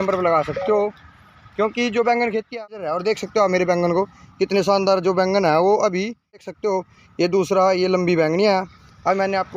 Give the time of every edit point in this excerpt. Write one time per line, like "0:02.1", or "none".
0:02.6
0:06.5